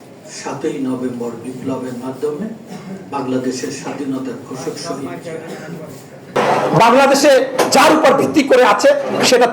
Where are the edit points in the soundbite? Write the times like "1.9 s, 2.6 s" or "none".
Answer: 6.3 s